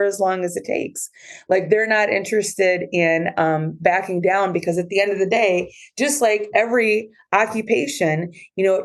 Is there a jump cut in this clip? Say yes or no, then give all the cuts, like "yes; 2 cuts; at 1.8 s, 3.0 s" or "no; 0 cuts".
no; 0 cuts